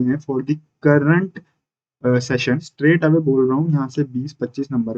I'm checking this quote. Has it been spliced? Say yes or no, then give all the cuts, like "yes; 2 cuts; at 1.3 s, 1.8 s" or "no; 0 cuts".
yes; 1 cut; at 2.7 s